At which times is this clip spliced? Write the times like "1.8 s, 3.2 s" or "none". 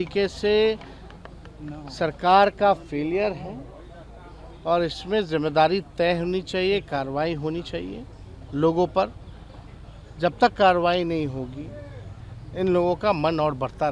none